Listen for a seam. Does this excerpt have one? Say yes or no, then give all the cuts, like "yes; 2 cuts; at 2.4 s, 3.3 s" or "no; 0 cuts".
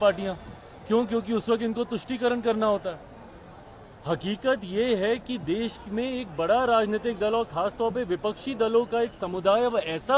no; 0 cuts